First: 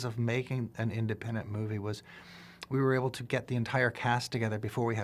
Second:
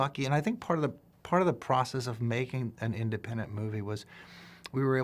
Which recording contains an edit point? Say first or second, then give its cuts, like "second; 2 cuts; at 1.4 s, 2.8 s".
second; 1 cut; at 1.1 s